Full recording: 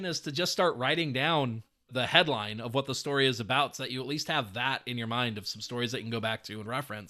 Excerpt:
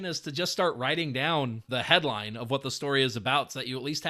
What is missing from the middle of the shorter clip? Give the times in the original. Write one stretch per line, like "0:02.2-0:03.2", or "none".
0:01.6-0:01.8